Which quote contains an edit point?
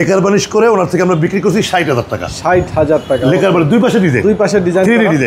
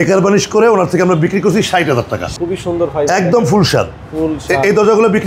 second; 1 cut; at 2.3 s

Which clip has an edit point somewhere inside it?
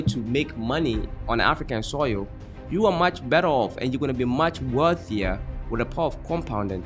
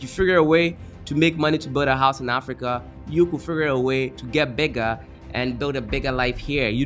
second; 2 cuts; at 4.2 s, 5.1 s

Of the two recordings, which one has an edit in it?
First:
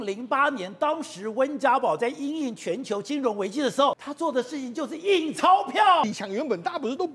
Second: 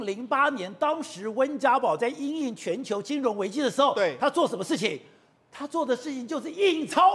first; 2 cuts; at 3.9 s, 6.0 s

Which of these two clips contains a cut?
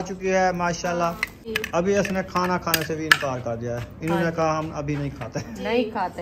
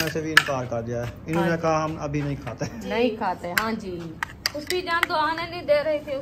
first; 1 cut; at 1.4 s

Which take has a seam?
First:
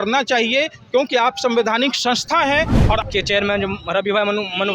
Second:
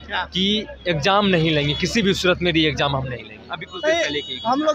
first; 1 cut; at 3.0 s

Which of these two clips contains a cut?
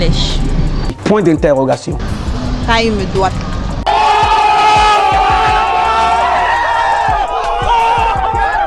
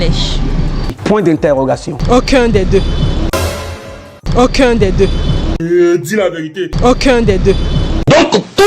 first; 1 cut; at 2.0 s

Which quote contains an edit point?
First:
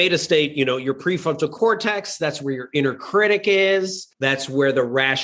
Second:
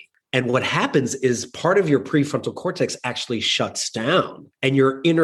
first; 1 cut; at 4.0 s

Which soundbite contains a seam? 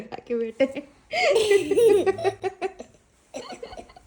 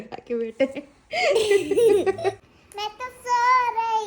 second; 1 cut; at 2.4 s

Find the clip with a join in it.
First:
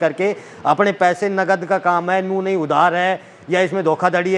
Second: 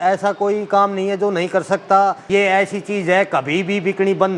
second; 1 cut; at 2.2 s

